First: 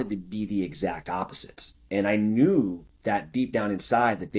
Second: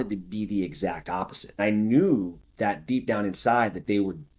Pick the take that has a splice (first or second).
second